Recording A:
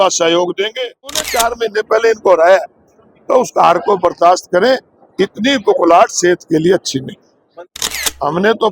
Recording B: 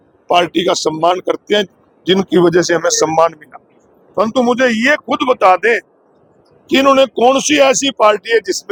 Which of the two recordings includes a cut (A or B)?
A